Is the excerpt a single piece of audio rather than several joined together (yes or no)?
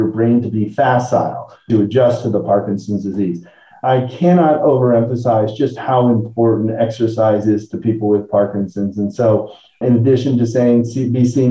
yes